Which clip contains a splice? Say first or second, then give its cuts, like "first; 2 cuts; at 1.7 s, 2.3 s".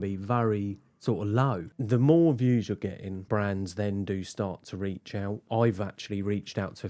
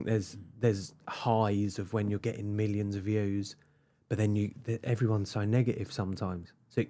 first; 3 cuts; at 1.7 s, 3.1 s, 5.4 s